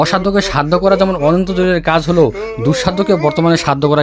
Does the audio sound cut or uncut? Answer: uncut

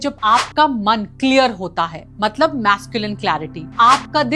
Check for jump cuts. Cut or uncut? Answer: uncut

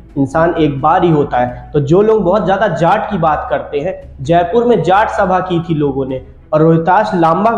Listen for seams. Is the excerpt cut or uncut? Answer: uncut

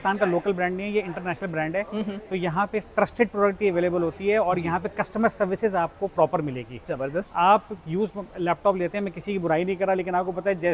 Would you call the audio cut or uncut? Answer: uncut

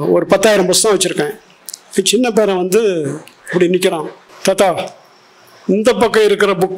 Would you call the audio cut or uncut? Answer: cut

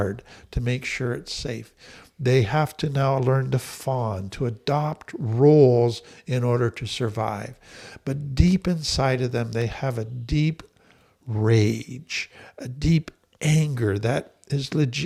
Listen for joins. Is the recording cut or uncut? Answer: uncut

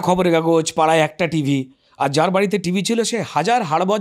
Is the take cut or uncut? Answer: uncut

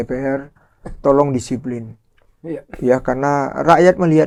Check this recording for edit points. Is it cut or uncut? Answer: uncut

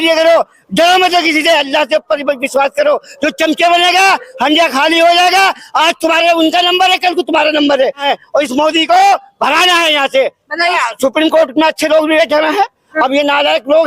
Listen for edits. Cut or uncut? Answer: cut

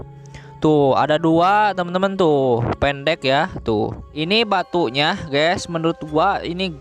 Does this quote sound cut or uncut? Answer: cut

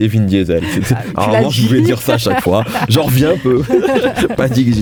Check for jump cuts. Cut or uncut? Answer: uncut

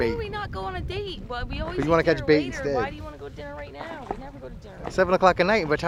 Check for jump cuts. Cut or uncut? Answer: uncut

